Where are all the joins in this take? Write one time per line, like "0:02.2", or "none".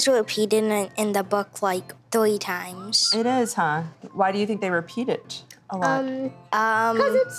0:04.0